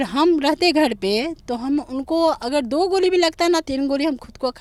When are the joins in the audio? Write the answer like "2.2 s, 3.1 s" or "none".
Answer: none